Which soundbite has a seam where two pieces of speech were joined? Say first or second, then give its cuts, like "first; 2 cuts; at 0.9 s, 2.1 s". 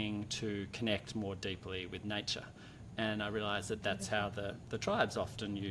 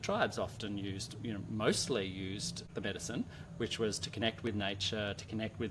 second; 1 cut; at 2.6 s